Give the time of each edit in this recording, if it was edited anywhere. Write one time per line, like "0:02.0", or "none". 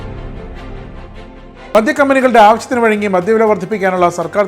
0:01.7